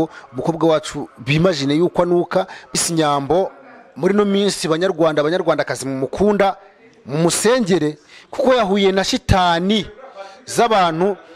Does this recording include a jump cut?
yes; 1 cut; at 2.8 s

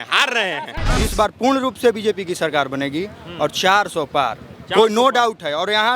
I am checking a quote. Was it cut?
yes; 1 cut; at 0.9 s

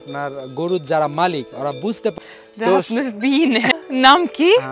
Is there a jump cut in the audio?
yes; 2 cuts; at 2.1 s, 3.7 s

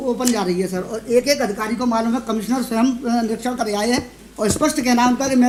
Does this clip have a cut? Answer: no; 0 cuts

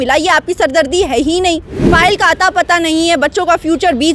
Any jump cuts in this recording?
yes; 1 cut; at 1.7 s

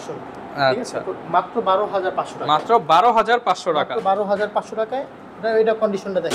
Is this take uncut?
yes; 0 cuts

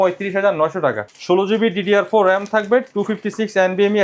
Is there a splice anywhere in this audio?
yes; 1 cut; at 1.1 s

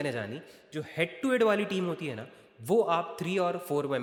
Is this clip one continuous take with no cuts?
yes; 0 cuts

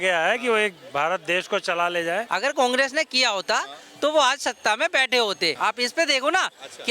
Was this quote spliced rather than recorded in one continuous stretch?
yes; 2 cuts; at 2.3 s, 5.6 s

